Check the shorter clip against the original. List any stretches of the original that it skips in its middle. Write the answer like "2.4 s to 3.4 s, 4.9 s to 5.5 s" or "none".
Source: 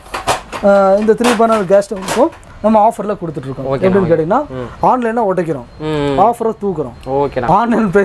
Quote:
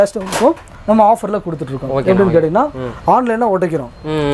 none